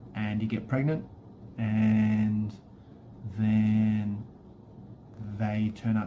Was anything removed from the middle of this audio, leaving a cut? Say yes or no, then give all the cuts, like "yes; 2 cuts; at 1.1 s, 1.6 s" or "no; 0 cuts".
no; 0 cuts